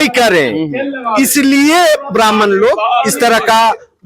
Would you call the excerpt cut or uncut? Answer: uncut